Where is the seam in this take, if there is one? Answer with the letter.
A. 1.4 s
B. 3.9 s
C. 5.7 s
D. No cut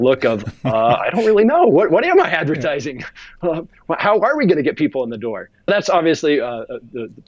C